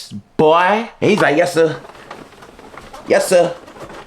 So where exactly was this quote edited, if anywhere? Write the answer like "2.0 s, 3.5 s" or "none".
0.9 s